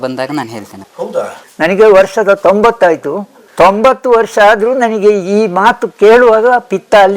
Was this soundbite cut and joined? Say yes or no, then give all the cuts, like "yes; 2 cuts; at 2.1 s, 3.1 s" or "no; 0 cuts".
yes; 1 cut; at 1.4 s